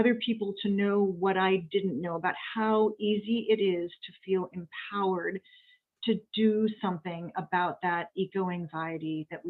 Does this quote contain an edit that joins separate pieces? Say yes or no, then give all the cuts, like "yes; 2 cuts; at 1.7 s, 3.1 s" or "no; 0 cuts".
no; 0 cuts